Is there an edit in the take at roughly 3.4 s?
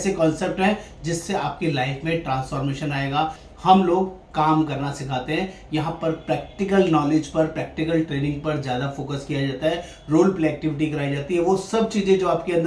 yes; 1 cut; at 3.4 s

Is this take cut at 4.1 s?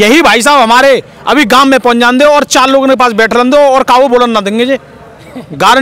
no; 0 cuts

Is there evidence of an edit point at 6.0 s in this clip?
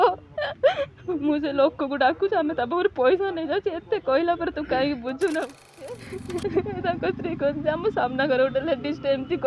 yes; 1 cut; at 6.0 s

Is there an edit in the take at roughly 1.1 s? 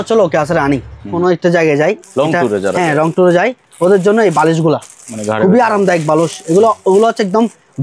yes; 1 cut; at 1.1 s

